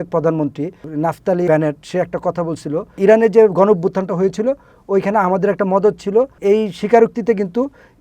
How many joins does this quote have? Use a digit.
3